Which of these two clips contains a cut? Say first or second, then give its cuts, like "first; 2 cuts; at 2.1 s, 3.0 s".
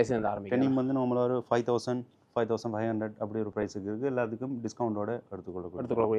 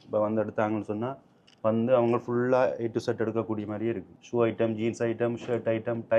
second; 1 cut; at 4.1 s